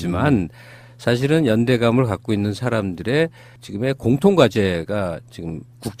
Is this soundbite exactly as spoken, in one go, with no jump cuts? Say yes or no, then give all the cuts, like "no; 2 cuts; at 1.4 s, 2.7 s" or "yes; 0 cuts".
yes; 0 cuts